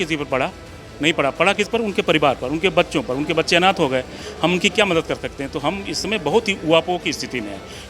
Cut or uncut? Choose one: cut